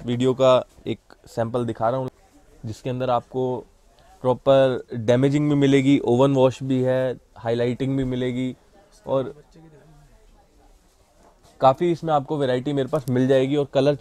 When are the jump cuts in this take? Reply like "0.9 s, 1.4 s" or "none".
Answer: 2.1 s